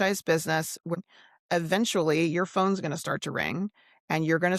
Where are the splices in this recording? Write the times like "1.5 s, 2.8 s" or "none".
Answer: 1.0 s